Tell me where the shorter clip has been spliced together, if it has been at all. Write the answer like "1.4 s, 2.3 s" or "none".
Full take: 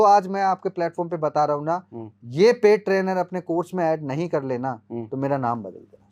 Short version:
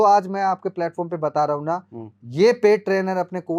none